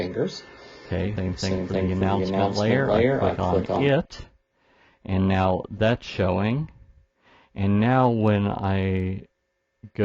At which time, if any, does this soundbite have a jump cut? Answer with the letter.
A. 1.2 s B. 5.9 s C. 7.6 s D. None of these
A